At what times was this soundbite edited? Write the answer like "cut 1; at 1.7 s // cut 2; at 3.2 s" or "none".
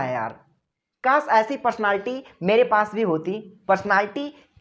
cut 1; at 3.5 s

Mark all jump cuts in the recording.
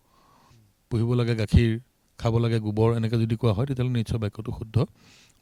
none

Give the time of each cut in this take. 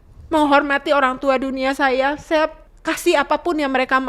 cut 1; at 2.7 s

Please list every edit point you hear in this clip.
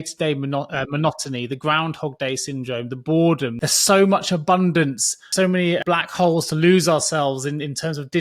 cut 1; at 3.5 s // cut 2; at 5.5 s

